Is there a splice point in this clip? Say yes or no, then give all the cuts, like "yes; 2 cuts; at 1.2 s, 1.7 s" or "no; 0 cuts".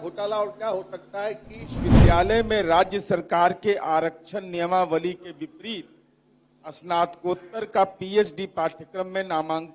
yes; 1 cut; at 2.0 s